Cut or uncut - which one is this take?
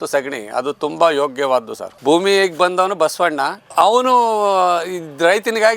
cut